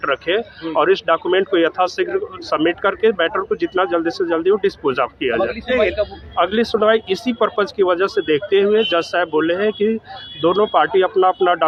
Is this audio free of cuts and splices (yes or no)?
yes